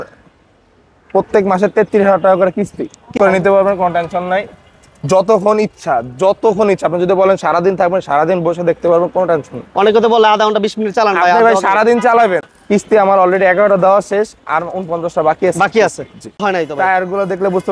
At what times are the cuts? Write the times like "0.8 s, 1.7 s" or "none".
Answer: 3.1 s, 12.5 s, 16.4 s